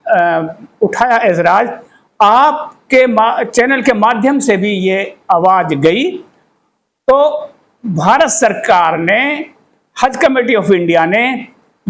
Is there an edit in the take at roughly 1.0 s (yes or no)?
no